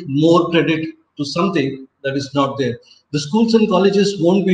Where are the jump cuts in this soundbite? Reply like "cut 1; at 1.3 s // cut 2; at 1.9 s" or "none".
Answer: none